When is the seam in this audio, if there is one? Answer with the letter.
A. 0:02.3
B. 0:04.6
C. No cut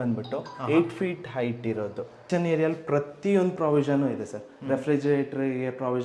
A